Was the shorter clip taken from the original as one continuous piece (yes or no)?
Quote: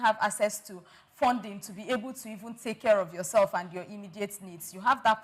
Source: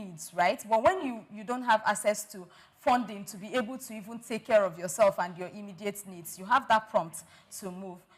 yes